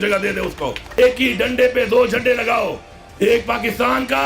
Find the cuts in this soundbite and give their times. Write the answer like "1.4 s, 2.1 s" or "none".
1.0 s